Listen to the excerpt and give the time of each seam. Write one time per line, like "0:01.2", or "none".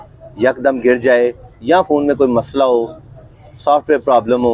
none